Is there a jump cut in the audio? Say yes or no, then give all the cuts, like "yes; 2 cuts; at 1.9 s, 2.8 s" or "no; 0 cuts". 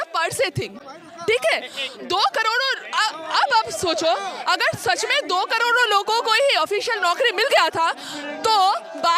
no; 0 cuts